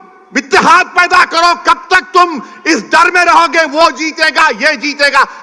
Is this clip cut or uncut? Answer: uncut